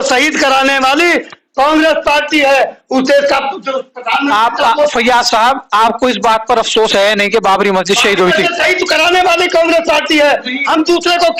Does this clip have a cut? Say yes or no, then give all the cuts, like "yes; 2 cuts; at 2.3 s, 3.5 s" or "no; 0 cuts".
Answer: no; 0 cuts